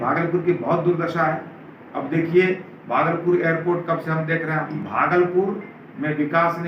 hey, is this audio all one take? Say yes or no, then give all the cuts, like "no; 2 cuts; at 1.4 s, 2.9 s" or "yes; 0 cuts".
no; 1 cut; at 4.8 s